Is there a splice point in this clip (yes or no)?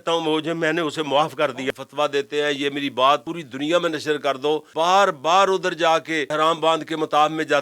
yes